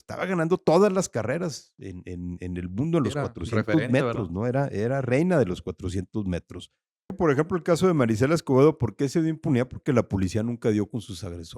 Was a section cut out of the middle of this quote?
yes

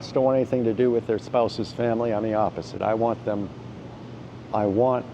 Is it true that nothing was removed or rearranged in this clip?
yes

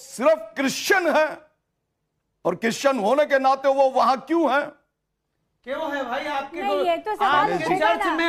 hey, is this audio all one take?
yes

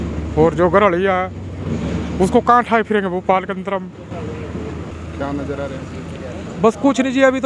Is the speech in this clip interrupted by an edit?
yes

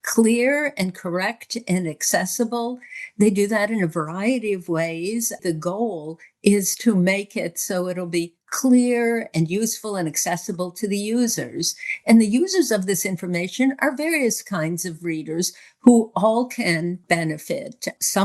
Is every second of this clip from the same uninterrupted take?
no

